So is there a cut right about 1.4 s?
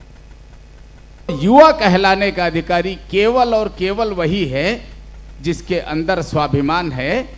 yes; 1 cut; at 1.4 s

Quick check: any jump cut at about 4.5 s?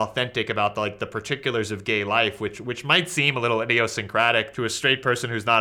yes; 1 cut; at 4.5 s

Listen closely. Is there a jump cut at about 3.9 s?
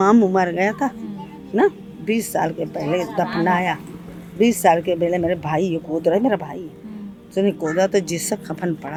no; 0 cuts

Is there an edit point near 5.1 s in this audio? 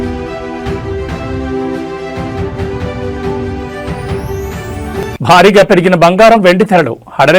yes; 1 cut; at 5.1 s

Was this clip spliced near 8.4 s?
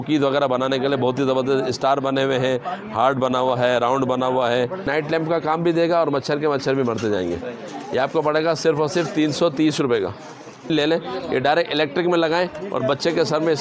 no; 2 cuts; at 4.9 s, 10.7 s

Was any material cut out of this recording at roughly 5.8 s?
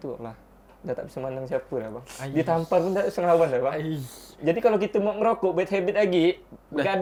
no; 0 cuts

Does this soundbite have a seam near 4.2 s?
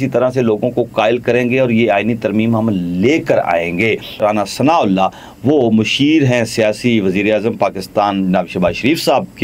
yes; 1 cut; at 4.2 s

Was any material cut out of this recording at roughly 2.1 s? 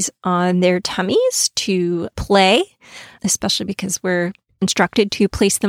yes; 2 cuts; at 2.1 s, 4.4 s

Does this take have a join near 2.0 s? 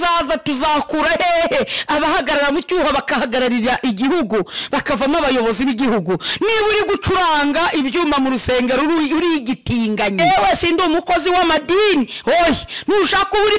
no; 1 cut; at 10.2 s

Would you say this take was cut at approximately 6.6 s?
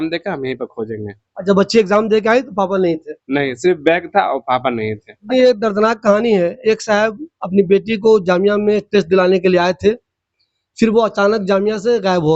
no; 1 cut; at 5.3 s

